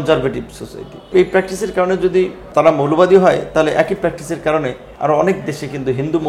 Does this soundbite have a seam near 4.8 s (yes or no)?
yes